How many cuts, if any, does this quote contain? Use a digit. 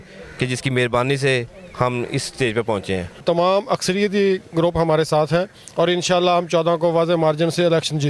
1